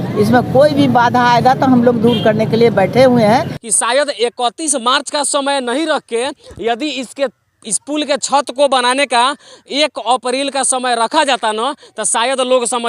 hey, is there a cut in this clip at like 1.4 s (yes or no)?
no